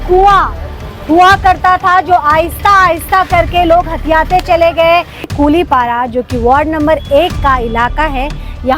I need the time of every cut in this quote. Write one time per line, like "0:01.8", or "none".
0:05.3